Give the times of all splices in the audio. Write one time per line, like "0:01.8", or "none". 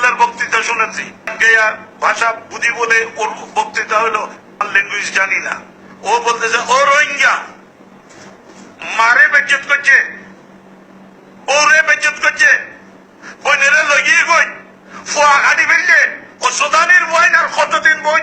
0:01.4
0:04.6